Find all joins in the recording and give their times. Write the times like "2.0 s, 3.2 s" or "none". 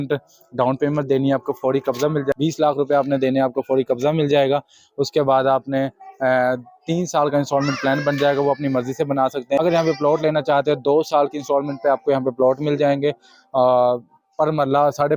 2.3 s, 9.6 s